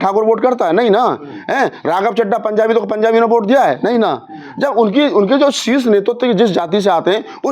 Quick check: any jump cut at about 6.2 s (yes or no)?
no